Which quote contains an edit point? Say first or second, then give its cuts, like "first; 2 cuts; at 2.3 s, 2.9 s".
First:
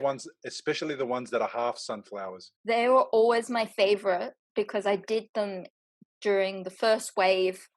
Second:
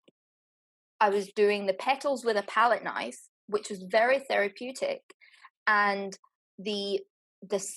first; 1 cut; at 2.5 s